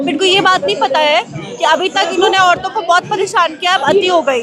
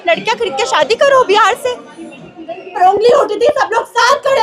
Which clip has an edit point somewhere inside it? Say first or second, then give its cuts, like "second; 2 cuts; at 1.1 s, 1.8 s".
second; 1 cut; at 2.8 s